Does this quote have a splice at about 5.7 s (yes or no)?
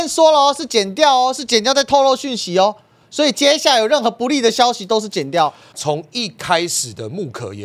yes